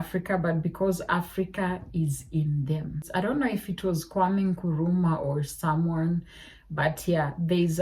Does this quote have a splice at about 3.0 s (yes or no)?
yes